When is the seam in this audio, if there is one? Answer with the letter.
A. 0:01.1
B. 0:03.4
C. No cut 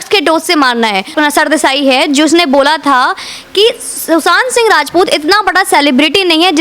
A